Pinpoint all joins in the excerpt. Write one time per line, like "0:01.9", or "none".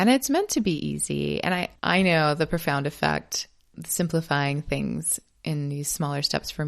0:01.7